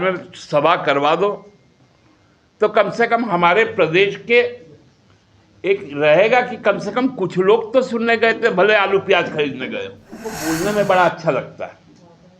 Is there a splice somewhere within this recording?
yes; 1 cut; at 10.4 s

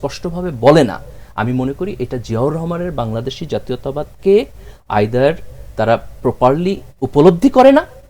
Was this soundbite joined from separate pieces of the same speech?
no; 0 cuts

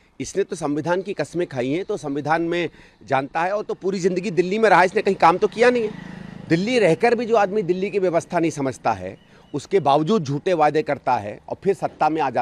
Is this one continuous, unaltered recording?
yes; 0 cuts

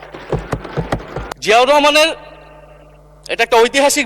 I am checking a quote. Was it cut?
yes; 1 cut; at 1.3 s

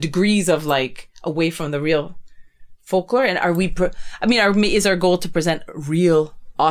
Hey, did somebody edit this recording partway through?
no; 0 cuts

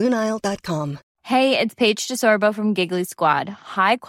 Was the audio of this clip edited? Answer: yes; 1 cut; at 1.0 s

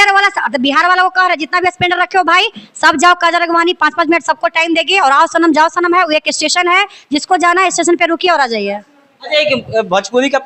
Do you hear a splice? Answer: no; 0 cuts

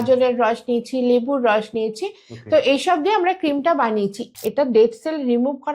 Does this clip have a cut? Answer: yes; 1 cut; at 4.2 s

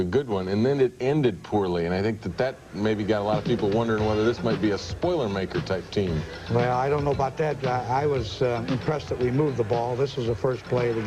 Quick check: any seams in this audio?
yes; 1 cut; at 2.9 s

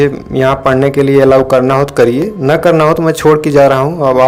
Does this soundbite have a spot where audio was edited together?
no; 0 cuts

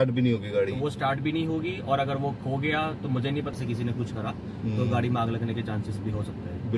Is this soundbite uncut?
no; 1 cut; at 3.5 s

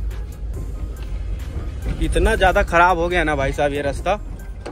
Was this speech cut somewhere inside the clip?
no; 0 cuts

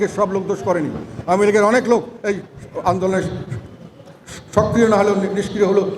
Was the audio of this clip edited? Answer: no; 0 cuts

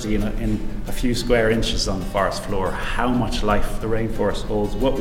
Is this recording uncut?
yes; 0 cuts

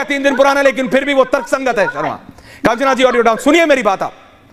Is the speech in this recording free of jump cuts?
yes; 0 cuts

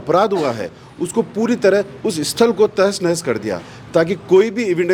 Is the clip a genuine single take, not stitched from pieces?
yes; 0 cuts

